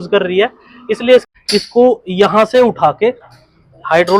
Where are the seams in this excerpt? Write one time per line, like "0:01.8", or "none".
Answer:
0:01.3